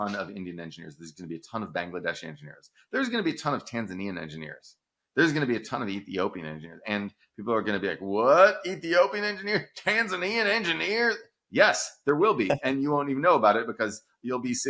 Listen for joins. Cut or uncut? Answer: uncut